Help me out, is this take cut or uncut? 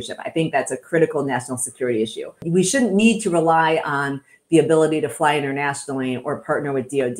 cut